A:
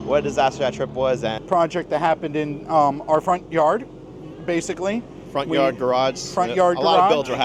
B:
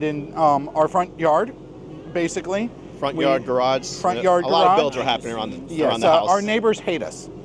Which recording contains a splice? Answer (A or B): A